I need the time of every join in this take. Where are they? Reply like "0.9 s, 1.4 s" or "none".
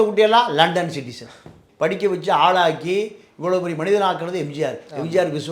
1.6 s